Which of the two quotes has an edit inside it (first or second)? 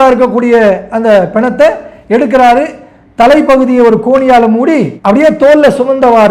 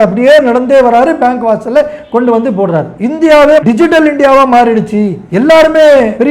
second